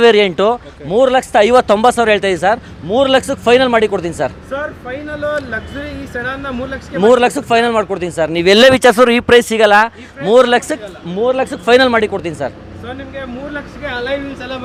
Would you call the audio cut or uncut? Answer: uncut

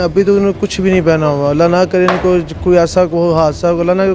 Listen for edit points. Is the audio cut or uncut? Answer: uncut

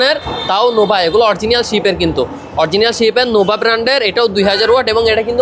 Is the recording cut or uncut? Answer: uncut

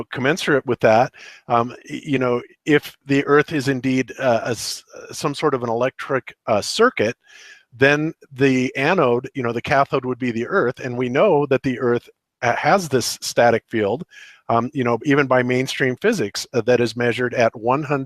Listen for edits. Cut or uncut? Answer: cut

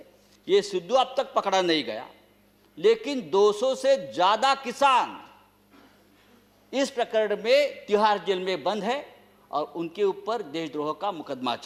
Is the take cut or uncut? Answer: uncut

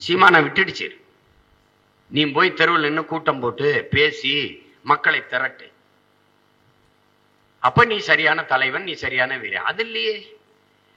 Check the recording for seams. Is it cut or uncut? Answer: uncut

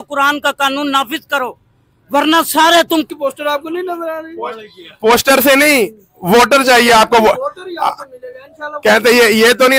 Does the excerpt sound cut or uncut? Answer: cut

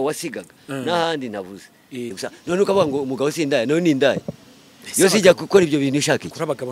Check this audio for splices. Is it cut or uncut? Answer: cut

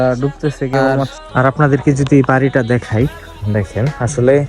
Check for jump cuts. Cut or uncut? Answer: cut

